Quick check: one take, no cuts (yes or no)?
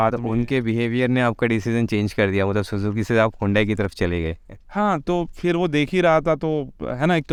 yes